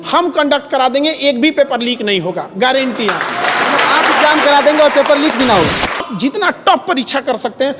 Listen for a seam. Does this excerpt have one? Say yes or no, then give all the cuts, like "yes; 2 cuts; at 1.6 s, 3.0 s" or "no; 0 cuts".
yes; 1 cut; at 6.1 s